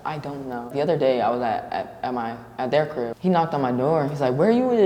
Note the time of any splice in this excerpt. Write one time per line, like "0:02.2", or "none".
0:00.7
0:03.1